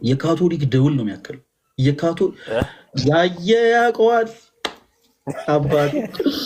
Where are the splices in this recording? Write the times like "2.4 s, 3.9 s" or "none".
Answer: none